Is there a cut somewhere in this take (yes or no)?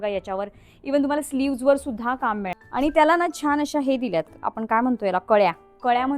yes